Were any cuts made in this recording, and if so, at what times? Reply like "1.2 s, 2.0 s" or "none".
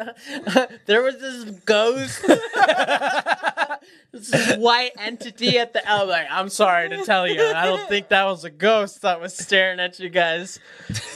none